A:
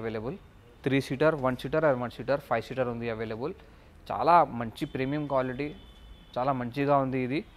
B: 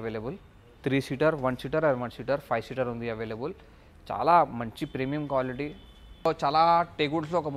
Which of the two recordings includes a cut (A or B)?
B